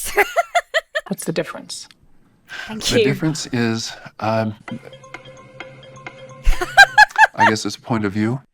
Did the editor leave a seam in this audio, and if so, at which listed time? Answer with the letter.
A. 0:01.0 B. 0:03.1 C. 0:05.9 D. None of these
A